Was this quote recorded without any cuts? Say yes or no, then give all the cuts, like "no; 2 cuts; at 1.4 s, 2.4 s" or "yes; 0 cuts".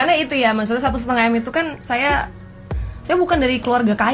yes; 0 cuts